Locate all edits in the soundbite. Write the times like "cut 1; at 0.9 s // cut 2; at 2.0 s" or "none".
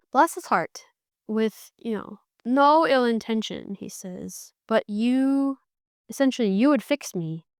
none